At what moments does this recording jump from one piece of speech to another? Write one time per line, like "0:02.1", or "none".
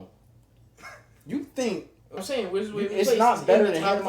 0:02.2